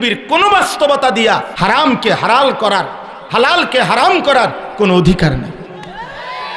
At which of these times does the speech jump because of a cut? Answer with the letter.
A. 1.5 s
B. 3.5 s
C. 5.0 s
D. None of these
A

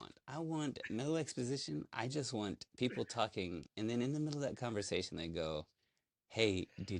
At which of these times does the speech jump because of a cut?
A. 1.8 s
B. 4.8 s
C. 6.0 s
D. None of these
D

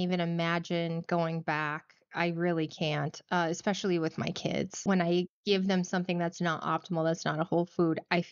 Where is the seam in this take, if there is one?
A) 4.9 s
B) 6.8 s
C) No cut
A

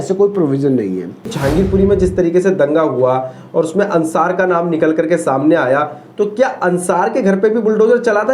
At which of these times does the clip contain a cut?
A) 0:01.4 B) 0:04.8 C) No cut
A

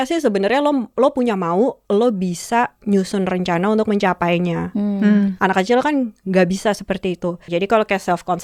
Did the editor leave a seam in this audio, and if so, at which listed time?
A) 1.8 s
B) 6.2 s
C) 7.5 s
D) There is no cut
C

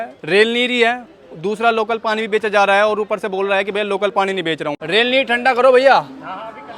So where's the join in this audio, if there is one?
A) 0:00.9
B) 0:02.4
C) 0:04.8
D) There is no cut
C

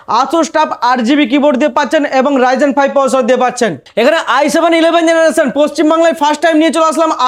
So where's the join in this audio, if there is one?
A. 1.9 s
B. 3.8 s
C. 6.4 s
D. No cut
D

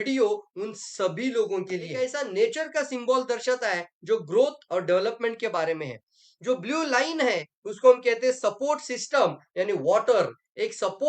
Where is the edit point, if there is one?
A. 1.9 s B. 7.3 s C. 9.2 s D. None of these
A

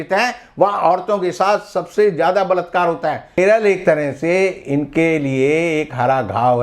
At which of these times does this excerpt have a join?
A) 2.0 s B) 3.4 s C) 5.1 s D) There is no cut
B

